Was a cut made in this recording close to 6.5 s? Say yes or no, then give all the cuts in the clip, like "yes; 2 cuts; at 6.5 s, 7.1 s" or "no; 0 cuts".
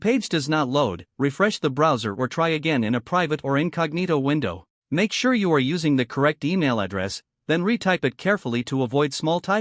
no; 1 cut; at 4.7 s